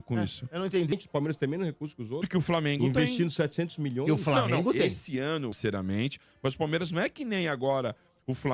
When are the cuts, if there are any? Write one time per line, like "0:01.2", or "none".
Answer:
0:00.9
0:05.6